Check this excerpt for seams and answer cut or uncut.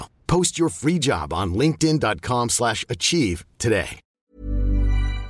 cut